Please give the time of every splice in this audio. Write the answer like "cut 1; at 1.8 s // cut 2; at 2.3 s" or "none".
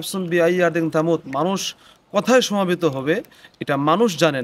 none